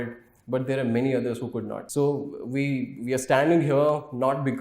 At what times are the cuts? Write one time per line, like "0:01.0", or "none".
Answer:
0:01.8